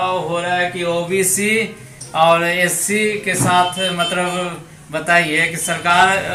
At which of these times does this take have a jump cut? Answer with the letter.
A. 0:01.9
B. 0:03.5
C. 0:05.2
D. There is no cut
D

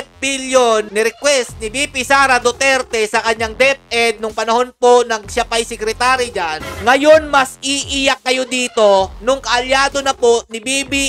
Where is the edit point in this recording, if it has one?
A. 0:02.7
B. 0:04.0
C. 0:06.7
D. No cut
C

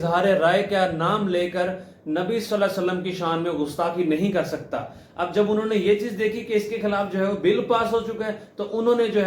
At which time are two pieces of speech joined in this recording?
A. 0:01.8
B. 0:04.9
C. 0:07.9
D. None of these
D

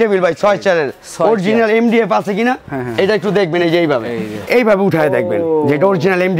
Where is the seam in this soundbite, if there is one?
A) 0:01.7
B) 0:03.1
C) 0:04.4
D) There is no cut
C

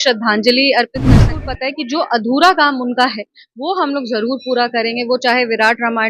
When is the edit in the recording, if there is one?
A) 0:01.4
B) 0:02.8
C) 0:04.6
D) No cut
A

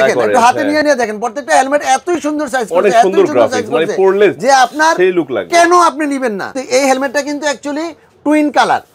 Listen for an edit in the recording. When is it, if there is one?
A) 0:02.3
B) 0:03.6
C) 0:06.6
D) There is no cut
C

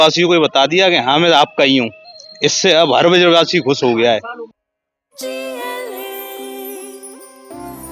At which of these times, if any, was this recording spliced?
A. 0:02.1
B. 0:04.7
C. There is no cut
C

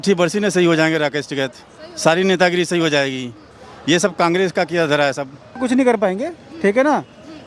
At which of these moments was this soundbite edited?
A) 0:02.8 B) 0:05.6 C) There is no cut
B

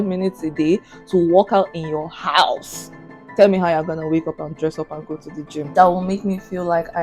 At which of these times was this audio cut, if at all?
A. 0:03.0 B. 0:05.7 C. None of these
B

